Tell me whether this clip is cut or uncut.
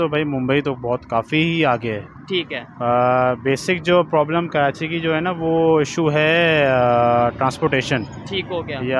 uncut